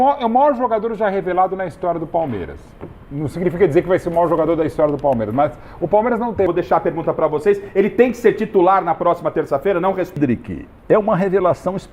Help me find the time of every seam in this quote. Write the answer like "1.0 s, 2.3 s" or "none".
6.5 s, 10.2 s